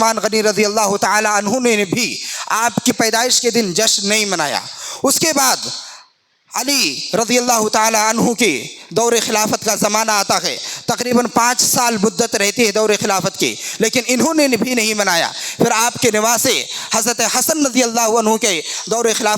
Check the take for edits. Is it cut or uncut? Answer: cut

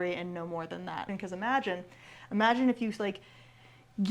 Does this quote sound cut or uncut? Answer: cut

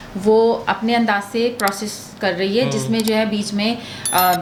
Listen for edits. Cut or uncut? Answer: uncut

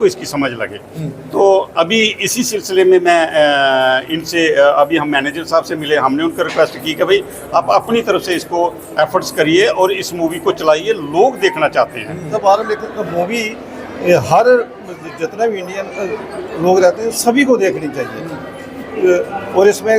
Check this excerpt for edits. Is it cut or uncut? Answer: cut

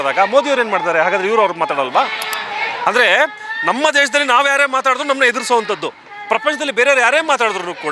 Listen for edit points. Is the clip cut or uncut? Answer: uncut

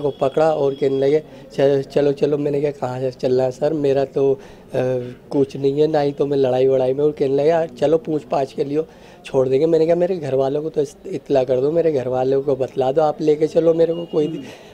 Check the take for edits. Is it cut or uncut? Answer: uncut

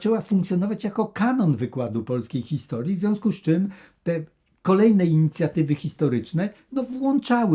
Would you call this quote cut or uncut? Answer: uncut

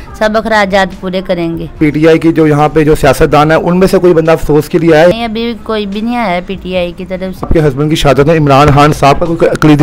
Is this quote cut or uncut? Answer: cut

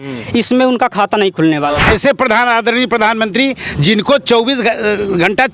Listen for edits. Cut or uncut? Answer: cut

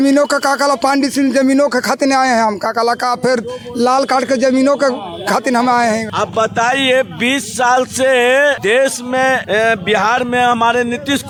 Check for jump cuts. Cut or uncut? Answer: uncut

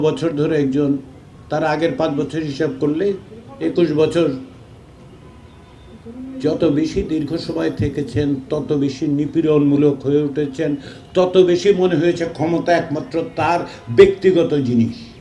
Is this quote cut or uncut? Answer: uncut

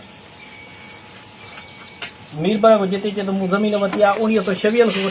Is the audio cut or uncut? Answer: uncut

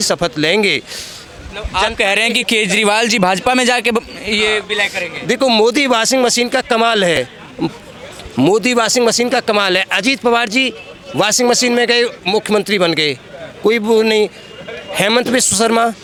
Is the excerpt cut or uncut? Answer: uncut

